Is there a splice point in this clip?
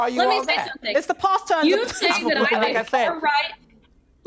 no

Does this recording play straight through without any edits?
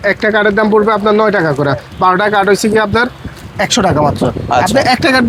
yes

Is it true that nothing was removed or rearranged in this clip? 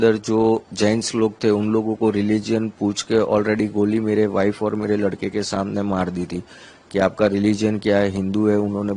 yes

